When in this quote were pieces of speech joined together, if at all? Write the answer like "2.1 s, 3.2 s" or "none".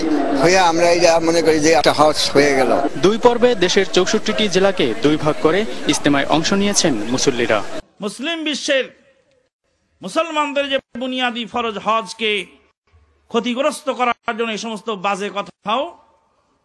none